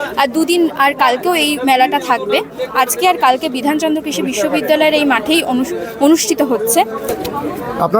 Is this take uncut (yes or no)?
no